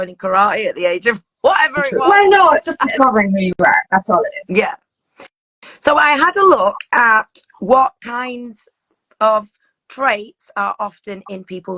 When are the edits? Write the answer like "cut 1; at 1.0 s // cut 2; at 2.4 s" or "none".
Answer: cut 1; at 2.8 s